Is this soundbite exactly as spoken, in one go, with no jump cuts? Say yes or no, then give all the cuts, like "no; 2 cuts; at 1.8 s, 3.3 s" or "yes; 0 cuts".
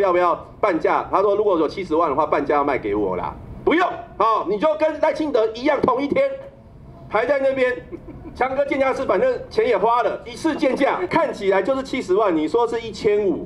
no; 1 cut; at 11.1 s